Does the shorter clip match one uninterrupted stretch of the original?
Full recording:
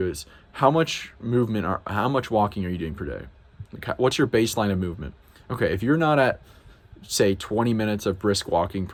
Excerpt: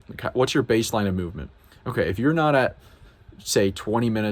yes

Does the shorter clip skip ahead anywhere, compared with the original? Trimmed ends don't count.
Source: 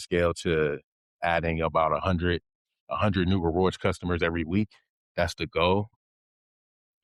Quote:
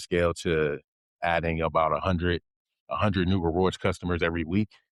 no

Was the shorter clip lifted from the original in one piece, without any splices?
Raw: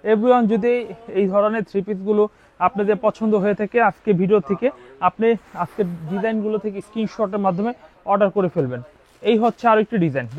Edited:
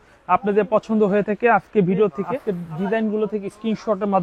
no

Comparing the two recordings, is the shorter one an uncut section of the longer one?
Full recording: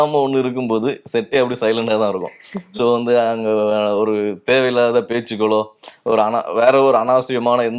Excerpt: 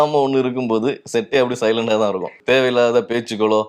no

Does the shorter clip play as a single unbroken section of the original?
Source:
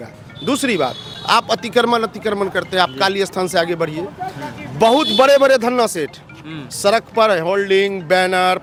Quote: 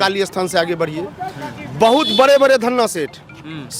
yes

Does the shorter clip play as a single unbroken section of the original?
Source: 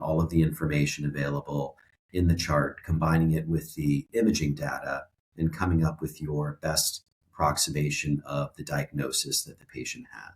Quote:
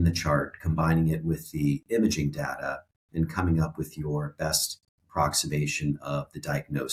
yes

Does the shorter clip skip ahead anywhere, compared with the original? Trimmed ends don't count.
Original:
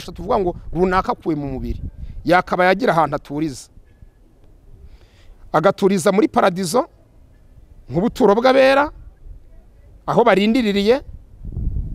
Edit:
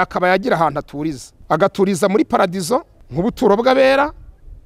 yes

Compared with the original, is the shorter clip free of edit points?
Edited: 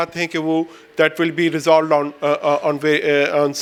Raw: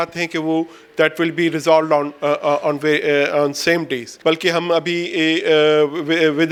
yes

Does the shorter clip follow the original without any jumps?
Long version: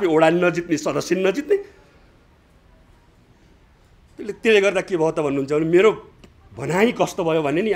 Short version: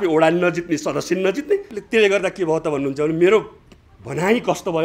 no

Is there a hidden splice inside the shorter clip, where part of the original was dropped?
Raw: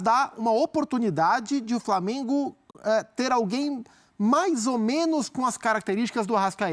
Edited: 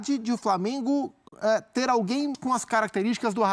yes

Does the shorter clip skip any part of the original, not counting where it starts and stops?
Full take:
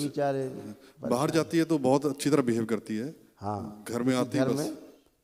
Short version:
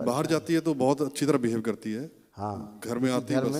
no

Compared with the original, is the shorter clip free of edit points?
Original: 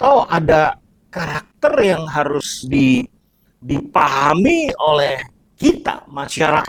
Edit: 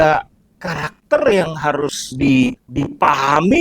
no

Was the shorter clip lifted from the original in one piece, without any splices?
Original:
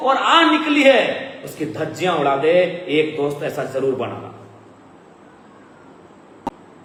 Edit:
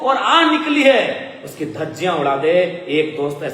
yes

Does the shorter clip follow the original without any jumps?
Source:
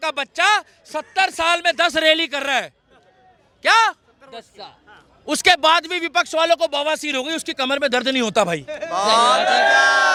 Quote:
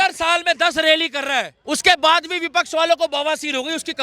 no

